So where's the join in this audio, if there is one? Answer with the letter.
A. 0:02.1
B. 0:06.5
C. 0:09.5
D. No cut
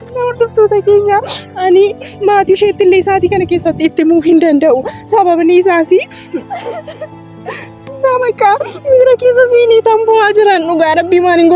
B